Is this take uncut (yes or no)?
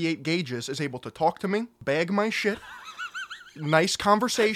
no